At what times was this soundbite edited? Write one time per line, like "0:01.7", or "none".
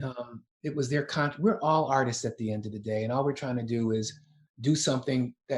0:04.5